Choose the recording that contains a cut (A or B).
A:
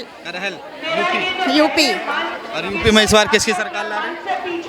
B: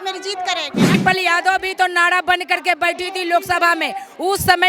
B